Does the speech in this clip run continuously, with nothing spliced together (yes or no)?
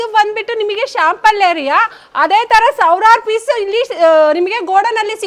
yes